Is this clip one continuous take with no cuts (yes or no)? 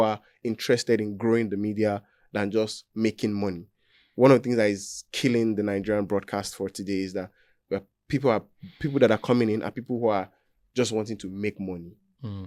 yes